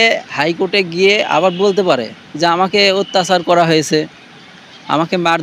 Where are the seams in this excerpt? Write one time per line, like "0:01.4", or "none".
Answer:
none